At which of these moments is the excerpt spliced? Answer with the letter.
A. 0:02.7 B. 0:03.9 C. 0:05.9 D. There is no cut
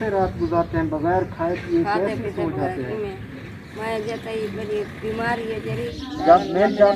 C